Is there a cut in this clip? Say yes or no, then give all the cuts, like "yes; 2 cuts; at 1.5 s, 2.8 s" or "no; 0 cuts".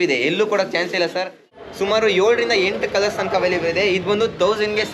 yes; 1 cut; at 1.6 s